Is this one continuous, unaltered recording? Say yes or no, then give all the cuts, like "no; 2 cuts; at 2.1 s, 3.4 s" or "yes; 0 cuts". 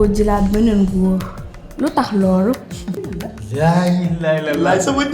no; 1 cut; at 3.1 s